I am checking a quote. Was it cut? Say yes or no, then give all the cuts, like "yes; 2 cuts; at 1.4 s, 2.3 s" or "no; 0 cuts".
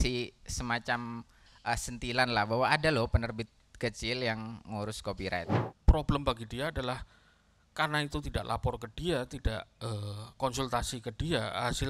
yes; 1 cut; at 5.6 s